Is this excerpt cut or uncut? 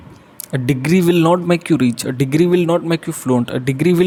uncut